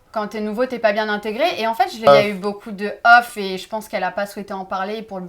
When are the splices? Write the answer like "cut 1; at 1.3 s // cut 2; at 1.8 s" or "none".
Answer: cut 1; at 2.1 s

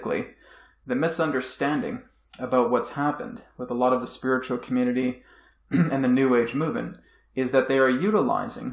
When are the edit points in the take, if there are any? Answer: cut 1; at 7.5 s

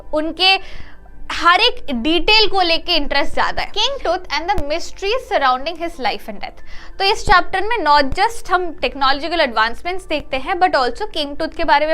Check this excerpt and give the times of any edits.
cut 1; at 3.7 s

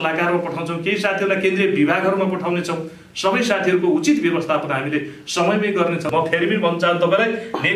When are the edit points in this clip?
cut 1; at 6.1 s

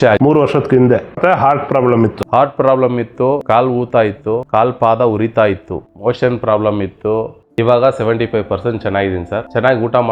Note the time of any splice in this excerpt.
cut 1; at 7.4 s

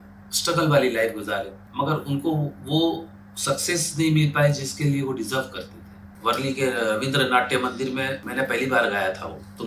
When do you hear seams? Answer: cut 1; at 1.6 s // cut 2; at 6.1 s // cut 3; at 8.2 s

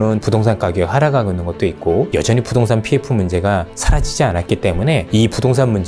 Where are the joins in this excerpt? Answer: cut 1; at 2.1 s // cut 2; at 5.1 s

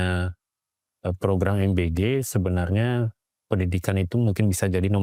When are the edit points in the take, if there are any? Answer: none

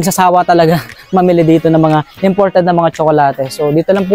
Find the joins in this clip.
none

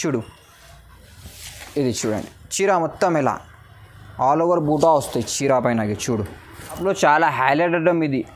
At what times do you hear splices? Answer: cut 1; at 6.8 s

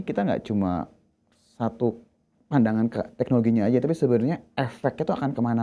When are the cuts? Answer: none

